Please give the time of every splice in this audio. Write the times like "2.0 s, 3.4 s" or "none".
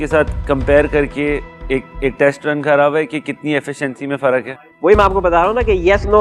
none

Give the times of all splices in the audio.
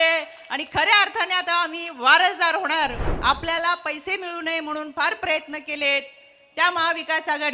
3.1 s

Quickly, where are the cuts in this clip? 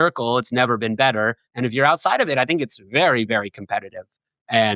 none

